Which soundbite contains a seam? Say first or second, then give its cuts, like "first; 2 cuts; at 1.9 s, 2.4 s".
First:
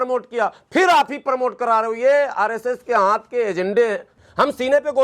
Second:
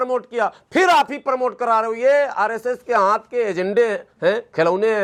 first; 1 cut; at 4.1 s